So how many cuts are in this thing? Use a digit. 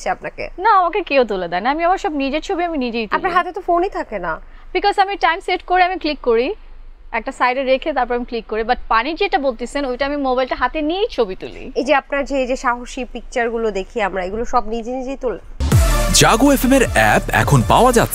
1